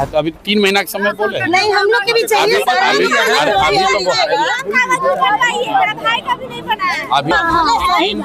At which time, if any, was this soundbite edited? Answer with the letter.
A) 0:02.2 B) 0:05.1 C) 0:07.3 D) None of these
C